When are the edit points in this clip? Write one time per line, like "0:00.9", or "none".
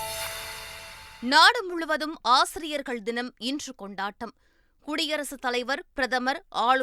0:01.0